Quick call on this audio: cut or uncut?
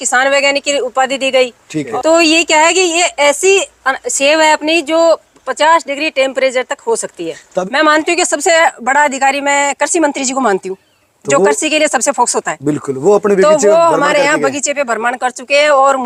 cut